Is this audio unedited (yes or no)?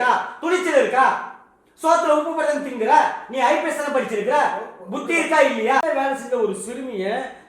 no